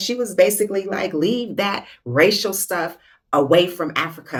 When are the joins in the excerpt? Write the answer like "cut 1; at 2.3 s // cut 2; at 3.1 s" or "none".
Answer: none